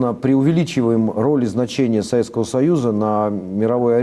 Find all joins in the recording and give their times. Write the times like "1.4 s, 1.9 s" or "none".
1.2 s